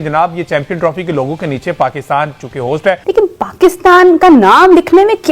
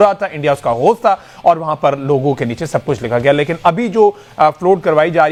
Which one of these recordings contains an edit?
first; 1 cut; at 3.0 s

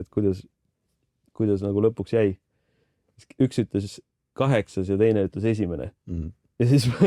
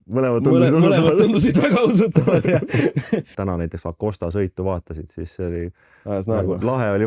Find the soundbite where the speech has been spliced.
second; 1 cut; at 3.3 s

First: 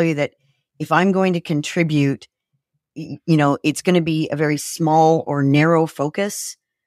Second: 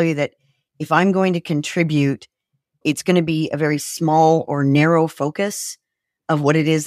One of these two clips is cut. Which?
second; 1 cut; at 2.8 s

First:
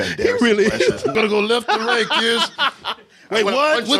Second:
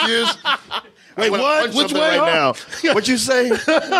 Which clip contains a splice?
first; 1 cut; at 1.1 s

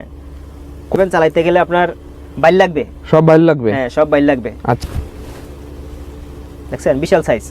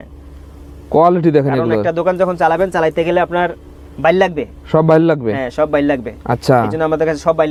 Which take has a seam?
first; 2 cuts; at 0.9 s, 4.8 s

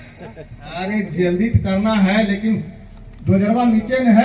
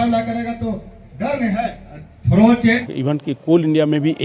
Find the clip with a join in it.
second; 1 cut; at 2.8 s

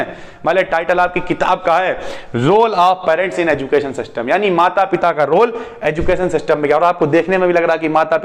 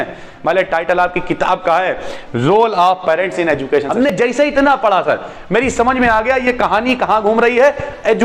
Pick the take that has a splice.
second; 1 cut; at 4.1 s

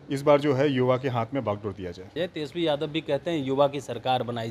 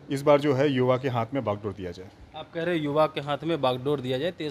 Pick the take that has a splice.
first; 1 cut; at 2.2 s

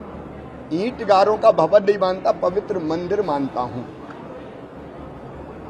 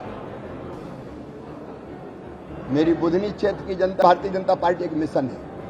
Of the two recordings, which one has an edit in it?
second; 1 cut; at 4.0 s

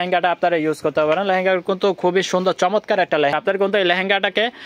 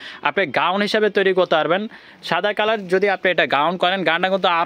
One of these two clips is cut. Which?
first; 1 cut; at 3.3 s

